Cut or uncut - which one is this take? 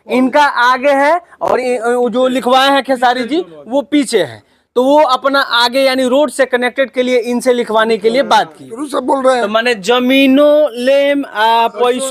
cut